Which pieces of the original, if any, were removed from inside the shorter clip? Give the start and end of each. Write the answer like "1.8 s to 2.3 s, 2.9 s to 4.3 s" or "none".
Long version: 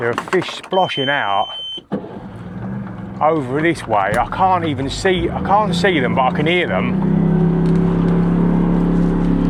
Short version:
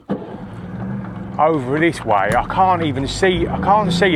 none